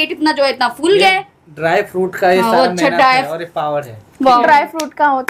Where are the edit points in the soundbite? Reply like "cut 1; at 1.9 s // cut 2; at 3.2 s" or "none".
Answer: none

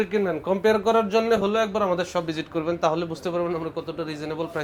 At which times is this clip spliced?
none

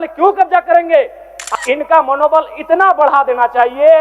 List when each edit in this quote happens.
cut 1; at 1.4 s

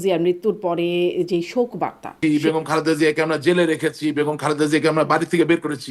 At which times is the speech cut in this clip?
cut 1; at 2.1 s

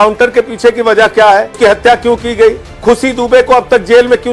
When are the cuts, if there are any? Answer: cut 1; at 1.6 s // cut 2; at 2.7 s

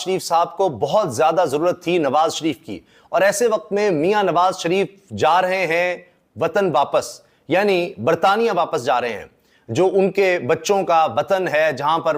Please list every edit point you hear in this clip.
none

